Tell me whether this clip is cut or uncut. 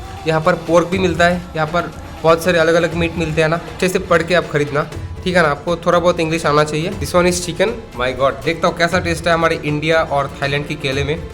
cut